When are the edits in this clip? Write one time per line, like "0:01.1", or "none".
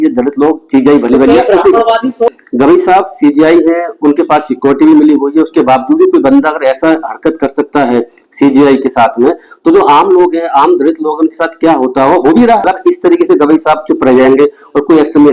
0:02.3
0:12.6